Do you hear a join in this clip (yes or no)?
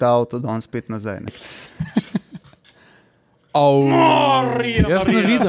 yes